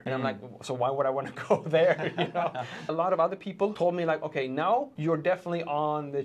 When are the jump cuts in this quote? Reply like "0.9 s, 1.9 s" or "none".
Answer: 2.8 s